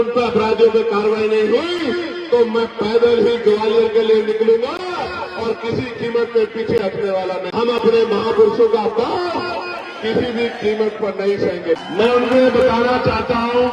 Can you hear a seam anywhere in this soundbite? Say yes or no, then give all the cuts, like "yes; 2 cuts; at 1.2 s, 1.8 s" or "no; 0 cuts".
yes; 2 cuts; at 7.4 s, 11.8 s